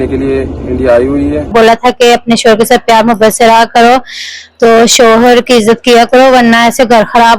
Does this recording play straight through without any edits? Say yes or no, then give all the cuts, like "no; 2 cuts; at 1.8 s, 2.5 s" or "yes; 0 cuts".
no; 1 cut; at 1.5 s